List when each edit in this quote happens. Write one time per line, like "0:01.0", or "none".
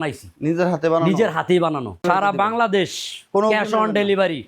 0:02.0